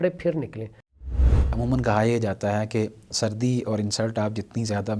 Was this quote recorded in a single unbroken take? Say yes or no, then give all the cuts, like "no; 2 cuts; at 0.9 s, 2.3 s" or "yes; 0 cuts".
no; 1 cut; at 1.1 s